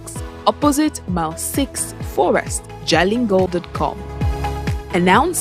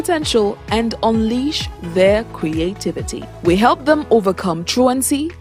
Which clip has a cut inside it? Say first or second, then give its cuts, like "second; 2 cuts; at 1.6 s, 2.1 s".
first; 1 cut; at 3.5 s